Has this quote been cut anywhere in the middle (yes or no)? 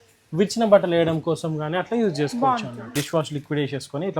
yes